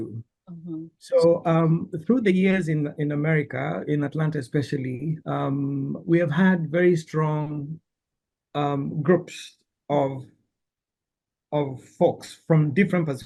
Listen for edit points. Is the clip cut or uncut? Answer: uncut